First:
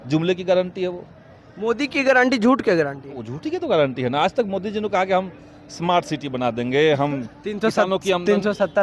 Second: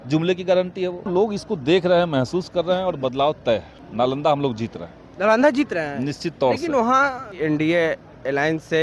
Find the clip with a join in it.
second; 3 cuts; at 1.1 s, 3.8 s, 7.3 s

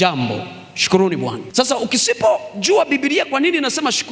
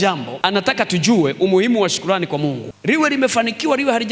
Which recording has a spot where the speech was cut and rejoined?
first; 1 cut; at 1.4 s

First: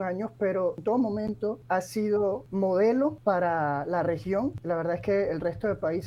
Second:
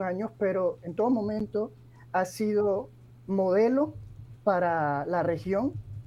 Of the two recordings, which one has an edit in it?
first; 5 cuts; at 0.8 s, 1.6 s, 2.5 s, 3.2 s, 4.6 s

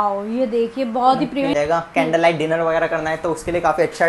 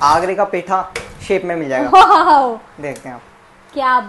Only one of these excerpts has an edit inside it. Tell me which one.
first; 1 cut; at 1.5 s

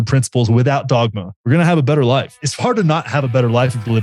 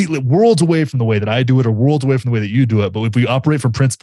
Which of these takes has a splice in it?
first; 2 cuts; at 1.3 s, 2.4 s

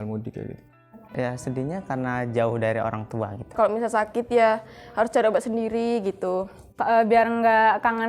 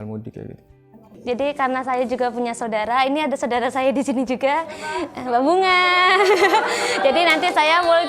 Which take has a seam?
first; 3 cuts; at 1.0 s, 3.6 s, 6.6 s

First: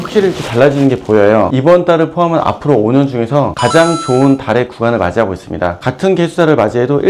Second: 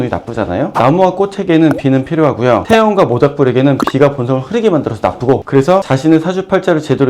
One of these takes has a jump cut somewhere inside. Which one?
first; 2 cuts; at 1.5 s, 5.8 s

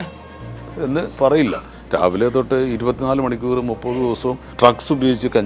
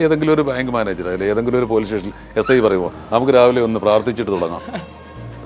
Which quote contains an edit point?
first; 2 cuts; at 1.7 s, 4.5 s

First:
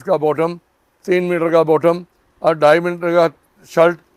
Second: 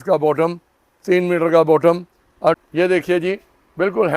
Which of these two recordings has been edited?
second; 1 cut; at 2.6 s

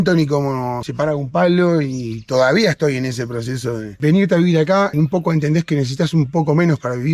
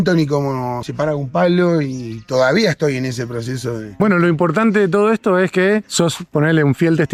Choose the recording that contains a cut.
first; 1 cut; at 3.9 s

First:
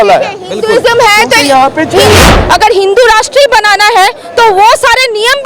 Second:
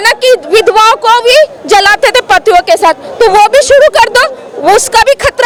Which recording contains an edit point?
first; 1 cut; at 2.3 s

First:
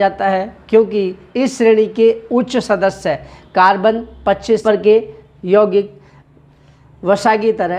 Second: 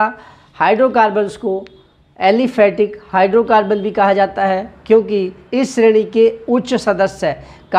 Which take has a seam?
first; 1 cut; at 4.6 s

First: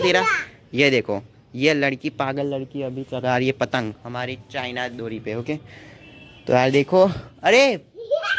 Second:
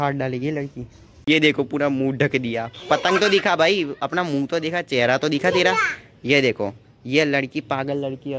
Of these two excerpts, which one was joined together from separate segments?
second; 1 cut; at 1.2 s

